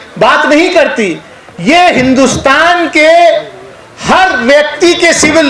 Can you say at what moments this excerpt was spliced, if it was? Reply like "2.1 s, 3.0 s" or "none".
none